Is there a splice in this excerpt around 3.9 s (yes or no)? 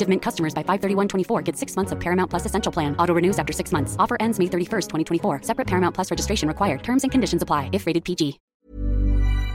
no